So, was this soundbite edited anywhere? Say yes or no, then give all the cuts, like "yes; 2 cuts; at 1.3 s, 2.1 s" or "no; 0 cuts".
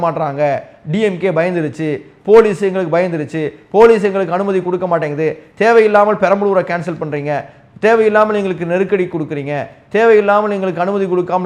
no; 0 cuts